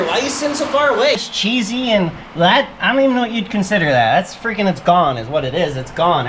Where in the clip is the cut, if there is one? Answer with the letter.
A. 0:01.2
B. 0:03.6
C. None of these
A